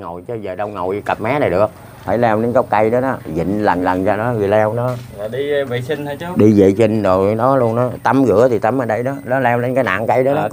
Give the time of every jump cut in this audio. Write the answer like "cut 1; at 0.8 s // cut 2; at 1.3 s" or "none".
none